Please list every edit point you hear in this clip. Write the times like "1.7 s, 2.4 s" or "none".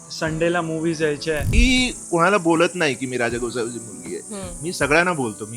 1.5 s